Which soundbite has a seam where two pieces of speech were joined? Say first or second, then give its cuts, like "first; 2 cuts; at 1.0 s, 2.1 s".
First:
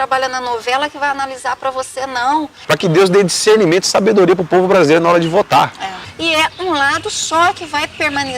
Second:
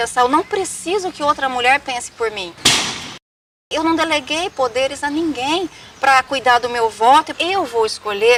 first; 2 cuts; at 2.5 s, 6.0 s